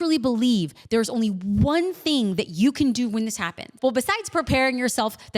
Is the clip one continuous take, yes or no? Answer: no